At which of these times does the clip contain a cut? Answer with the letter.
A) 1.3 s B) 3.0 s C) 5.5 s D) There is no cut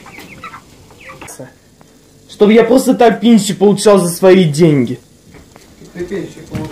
A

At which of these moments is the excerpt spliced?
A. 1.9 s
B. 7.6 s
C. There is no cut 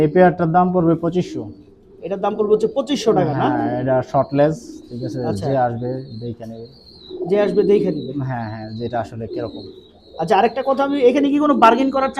C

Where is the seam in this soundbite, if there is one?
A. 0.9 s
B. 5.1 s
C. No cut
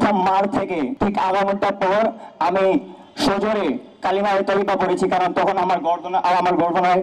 A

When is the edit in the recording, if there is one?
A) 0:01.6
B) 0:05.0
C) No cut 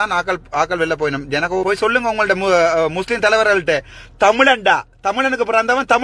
A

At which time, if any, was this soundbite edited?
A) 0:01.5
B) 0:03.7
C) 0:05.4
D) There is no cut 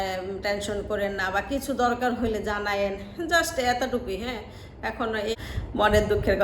C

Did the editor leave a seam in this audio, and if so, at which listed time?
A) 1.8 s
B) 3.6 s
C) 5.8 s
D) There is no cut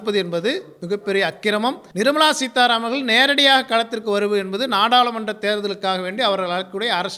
A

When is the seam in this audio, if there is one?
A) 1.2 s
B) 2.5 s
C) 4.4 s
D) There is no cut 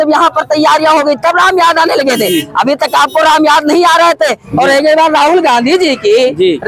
C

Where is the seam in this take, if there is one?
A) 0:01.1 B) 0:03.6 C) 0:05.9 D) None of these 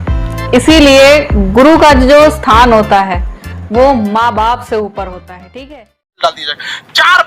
C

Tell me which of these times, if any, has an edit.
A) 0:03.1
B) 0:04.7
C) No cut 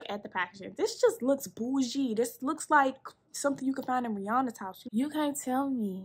B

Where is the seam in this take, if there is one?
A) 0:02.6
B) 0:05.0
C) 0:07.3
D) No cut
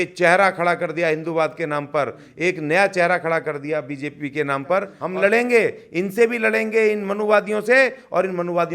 B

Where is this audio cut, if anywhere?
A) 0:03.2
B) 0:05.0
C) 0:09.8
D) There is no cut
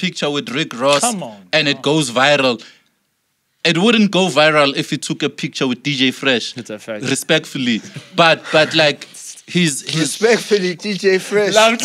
D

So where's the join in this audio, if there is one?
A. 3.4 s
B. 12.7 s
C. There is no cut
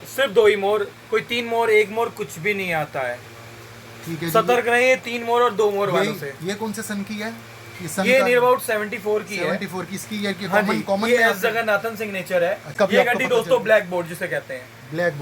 B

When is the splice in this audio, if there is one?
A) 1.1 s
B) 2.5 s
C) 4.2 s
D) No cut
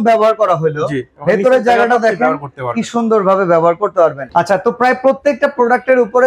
C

